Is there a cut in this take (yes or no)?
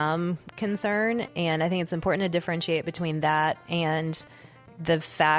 no